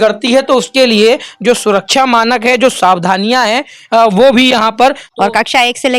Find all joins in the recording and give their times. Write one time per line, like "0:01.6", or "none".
0:05.0